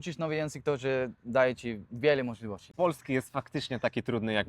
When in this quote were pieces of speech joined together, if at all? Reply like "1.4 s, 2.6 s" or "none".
2.6 s